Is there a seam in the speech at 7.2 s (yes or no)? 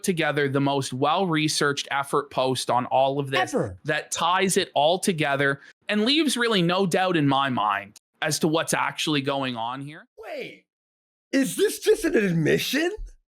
no